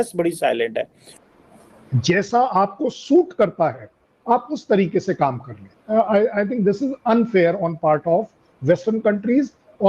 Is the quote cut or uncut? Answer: cut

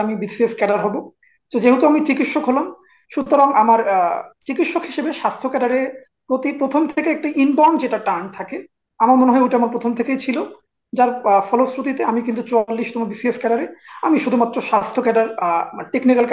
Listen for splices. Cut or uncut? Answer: uncut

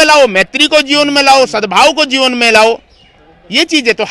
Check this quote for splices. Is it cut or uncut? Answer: uncut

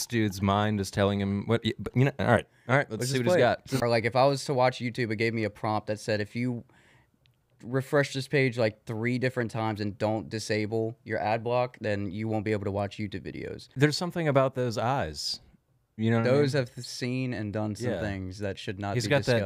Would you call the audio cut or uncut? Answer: cut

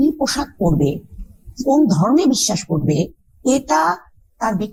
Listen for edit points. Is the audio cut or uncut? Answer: uncut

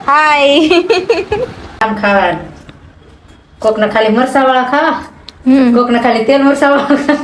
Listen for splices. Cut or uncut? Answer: cut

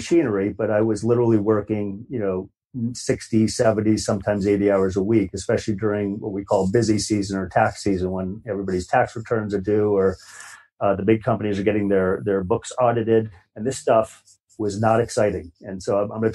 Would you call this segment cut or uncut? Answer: cut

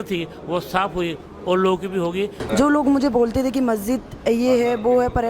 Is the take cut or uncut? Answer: cut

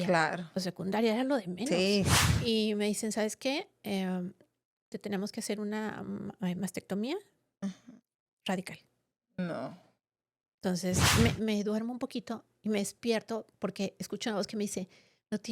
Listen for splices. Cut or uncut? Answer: cut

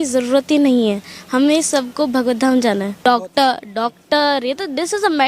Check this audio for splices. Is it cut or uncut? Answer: cut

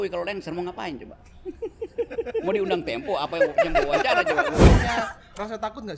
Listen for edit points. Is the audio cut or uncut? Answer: cut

